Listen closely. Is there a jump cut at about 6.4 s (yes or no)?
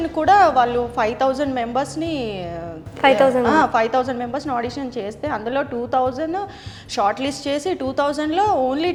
no